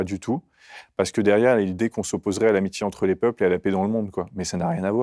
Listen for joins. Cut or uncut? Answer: uncut